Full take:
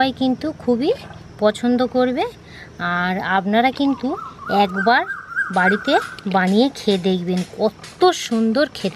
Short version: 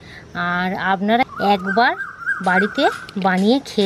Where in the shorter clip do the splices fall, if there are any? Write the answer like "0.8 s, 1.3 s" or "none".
1.3 s